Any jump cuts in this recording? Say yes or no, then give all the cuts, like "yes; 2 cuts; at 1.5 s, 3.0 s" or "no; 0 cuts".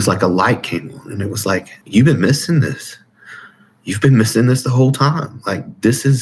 yes; 1 cut; at 1.8 s